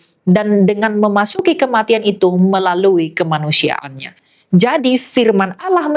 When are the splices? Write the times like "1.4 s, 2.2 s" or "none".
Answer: none

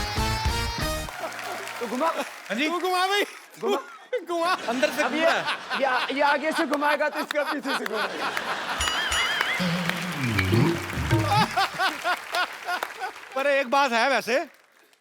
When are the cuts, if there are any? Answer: none

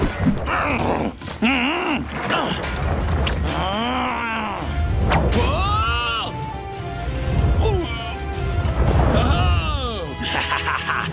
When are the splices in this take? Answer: 8.3 s

